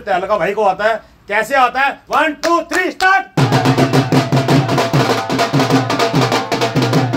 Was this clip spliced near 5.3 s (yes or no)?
no